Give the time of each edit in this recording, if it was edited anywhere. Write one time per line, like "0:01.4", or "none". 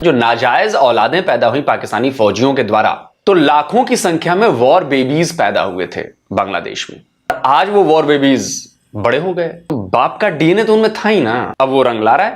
0:03.1
0:07.3
0:09.7
0:11.5